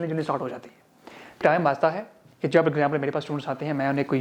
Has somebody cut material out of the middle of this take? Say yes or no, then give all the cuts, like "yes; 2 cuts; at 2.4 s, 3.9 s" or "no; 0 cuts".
yes; 1 cut; at 1.4 s